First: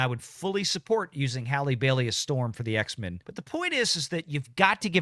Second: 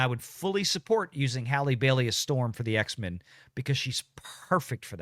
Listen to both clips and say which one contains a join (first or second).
first